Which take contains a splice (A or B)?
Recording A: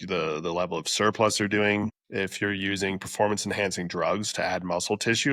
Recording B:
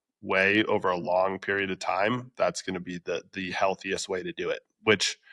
A